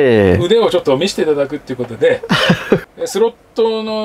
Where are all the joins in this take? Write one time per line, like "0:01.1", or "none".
0:02.8

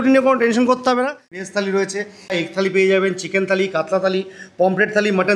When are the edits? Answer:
0:01.4
0:02.3

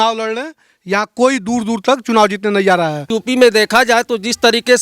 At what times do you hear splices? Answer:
0:03.1

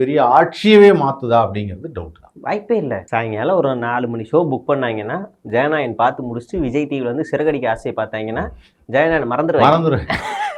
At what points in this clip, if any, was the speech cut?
0:03.0

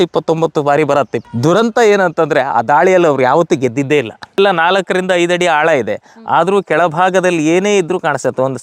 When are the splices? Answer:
0:01.2
0:04.4

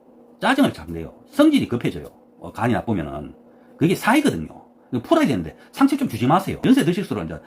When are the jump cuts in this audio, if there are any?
0:06.2

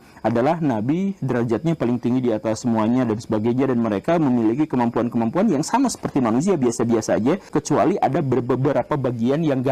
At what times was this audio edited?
0:07.4

